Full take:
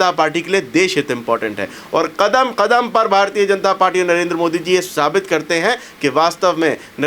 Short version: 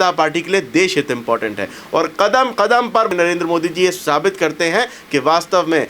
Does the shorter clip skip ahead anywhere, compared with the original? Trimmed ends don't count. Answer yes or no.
yes